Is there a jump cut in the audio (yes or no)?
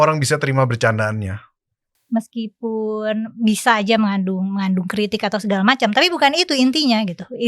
yes